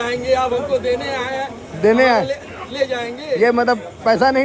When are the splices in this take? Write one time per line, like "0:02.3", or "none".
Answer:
none

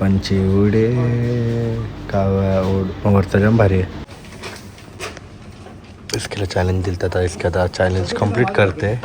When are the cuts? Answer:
0:04.1

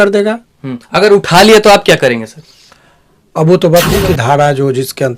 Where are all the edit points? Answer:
0:04.0

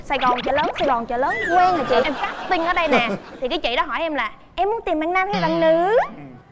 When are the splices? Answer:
0:02.0

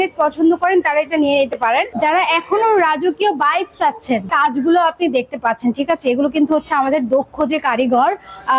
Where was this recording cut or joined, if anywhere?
0:01.9
0:04.3

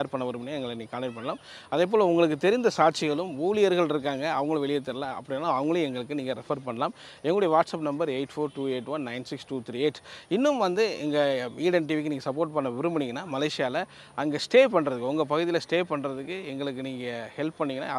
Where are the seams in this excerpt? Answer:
none

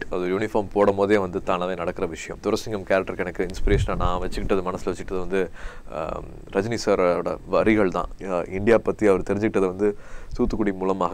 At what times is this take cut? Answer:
0:02.3
0:08.1

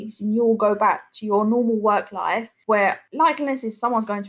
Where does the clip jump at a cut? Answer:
0:02.9

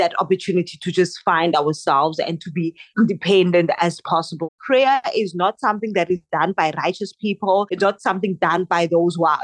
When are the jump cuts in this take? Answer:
0:04.5

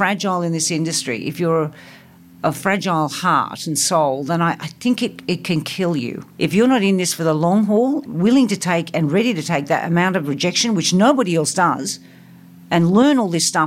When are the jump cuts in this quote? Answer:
0:06.2
0:08.0

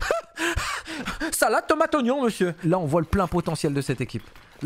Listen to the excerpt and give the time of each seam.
0:02.6

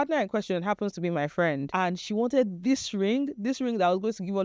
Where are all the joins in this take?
0:01.7

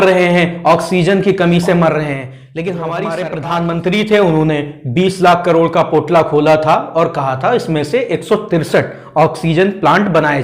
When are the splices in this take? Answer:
0:03.3

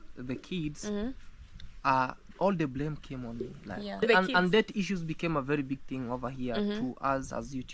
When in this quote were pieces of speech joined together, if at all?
0:04.0

